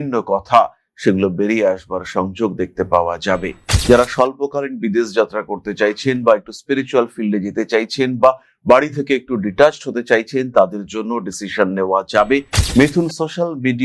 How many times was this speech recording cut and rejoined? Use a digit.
2